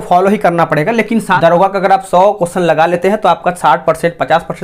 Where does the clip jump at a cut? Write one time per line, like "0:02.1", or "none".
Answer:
0:01.4